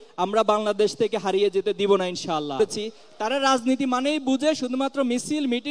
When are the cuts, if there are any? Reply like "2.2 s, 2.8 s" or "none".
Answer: 2.6 s